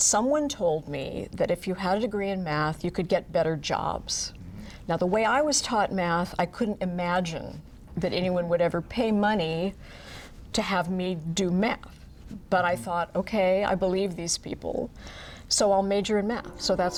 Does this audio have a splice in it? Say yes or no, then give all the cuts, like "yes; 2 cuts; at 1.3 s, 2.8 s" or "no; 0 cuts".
no; 0 cuts